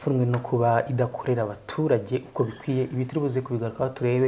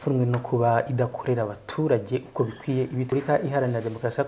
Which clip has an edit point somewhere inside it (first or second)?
second